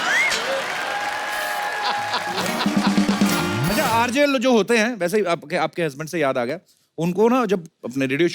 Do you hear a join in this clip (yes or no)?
yes